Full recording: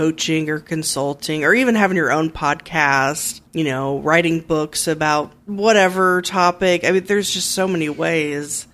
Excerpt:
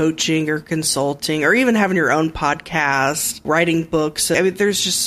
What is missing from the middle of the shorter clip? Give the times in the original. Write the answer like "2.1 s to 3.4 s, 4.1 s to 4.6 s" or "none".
3.4 s to 4.0 s, 4.9 s to 6.9 s